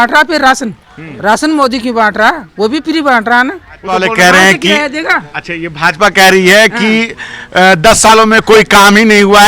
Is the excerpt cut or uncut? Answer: cut